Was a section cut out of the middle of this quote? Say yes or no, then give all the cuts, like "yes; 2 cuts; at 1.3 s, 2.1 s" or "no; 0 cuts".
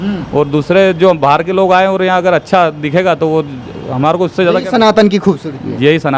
no; 0 cuts